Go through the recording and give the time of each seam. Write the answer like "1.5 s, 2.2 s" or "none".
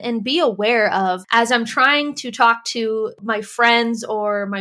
3.2 s